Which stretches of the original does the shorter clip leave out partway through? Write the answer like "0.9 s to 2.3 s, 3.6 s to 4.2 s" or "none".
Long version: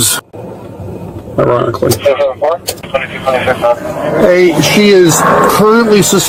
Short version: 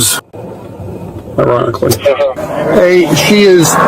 2.4 s to 3.8 s